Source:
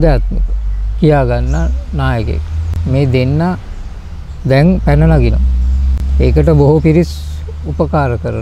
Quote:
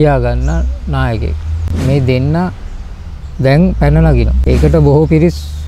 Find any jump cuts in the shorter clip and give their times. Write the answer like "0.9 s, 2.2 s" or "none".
4.4 s